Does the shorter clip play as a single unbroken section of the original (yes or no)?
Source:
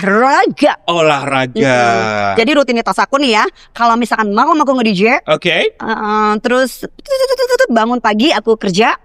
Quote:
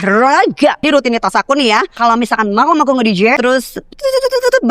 no